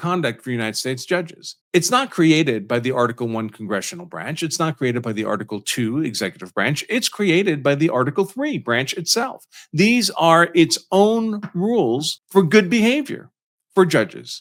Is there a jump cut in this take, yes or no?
no